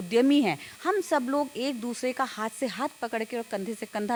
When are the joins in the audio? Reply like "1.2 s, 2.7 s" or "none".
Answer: none